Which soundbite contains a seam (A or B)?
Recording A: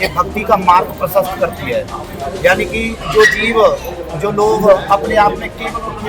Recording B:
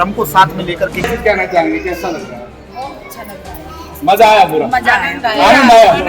B